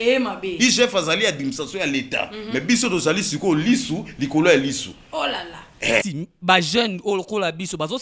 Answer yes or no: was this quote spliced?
yes